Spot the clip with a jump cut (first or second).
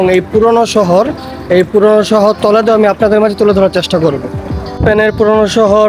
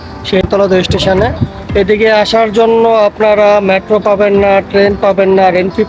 first